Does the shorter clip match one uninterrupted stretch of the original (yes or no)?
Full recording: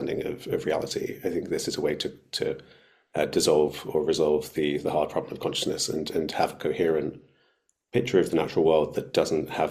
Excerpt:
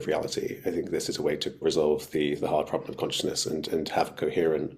no